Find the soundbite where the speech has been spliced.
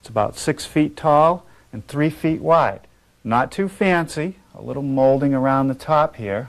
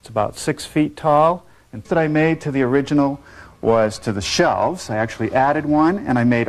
first; 1 cut; at 1.9 s

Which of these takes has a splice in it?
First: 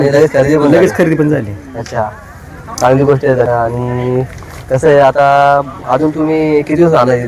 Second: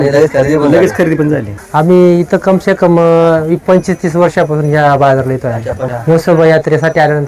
second; 2 cuts; at 1.6 s, 5.9 s

